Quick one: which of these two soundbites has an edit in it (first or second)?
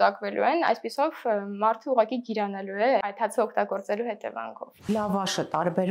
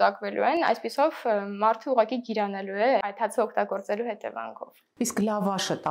first